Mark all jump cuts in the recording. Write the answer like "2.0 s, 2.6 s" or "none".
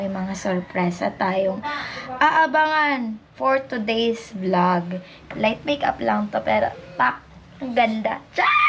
5.2 s